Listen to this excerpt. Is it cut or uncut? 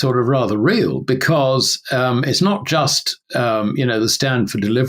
uncut